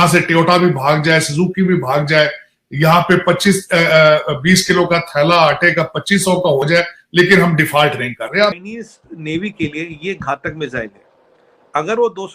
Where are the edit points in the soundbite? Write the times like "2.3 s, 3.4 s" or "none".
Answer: 8.5 s